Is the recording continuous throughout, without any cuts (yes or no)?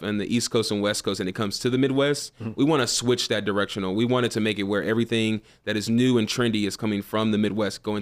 yes